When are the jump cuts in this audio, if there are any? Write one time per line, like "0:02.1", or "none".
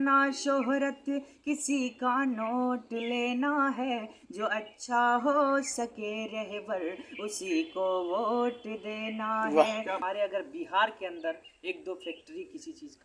0:10.0